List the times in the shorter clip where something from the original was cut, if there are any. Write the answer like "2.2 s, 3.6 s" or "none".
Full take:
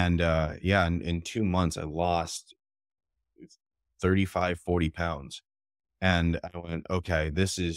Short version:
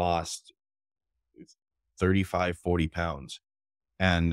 none